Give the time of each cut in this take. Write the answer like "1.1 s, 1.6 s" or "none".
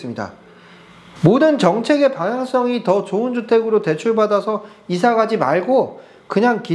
1.0 s